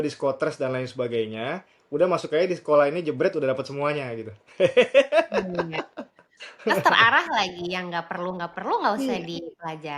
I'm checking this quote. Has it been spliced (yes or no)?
no